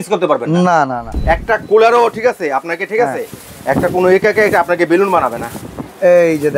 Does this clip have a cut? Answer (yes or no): yes